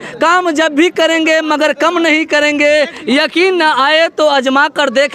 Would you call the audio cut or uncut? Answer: uncut